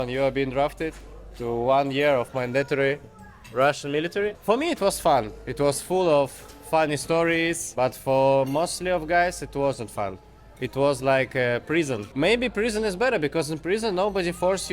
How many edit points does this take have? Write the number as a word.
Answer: three